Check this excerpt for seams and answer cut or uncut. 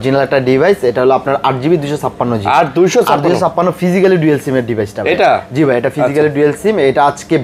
uncut